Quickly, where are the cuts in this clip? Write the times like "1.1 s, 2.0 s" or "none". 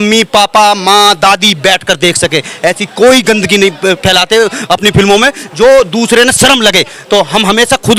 none